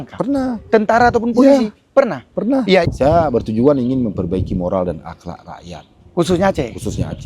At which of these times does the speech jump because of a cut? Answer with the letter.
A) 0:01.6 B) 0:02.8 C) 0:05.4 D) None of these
B